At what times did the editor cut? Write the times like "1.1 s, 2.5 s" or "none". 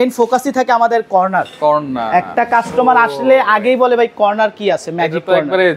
none